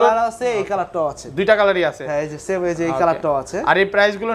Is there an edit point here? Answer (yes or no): no